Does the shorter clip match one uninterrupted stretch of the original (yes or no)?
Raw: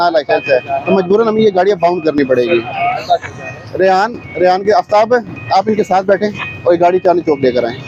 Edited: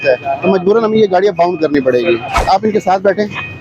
no